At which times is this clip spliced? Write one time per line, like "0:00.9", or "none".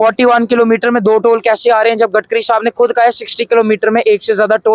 none